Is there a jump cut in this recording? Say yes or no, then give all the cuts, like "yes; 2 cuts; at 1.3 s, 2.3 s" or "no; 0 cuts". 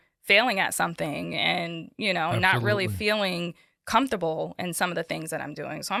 no; 0 cuts